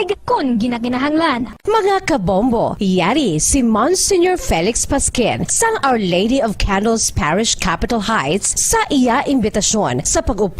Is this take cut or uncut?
cut